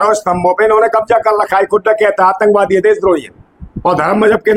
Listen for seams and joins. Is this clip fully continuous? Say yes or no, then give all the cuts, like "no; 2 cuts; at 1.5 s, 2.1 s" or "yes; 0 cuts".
yes; 0 cuts